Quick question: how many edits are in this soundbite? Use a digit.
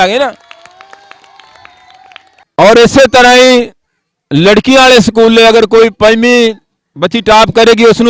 1